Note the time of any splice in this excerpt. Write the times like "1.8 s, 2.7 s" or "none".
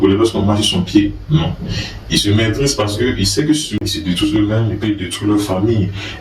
3.7 s